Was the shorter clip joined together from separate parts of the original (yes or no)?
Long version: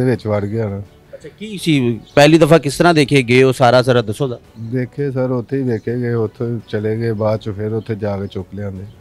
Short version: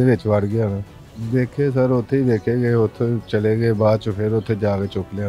yes